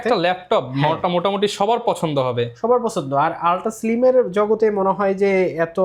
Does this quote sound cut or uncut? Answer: uncut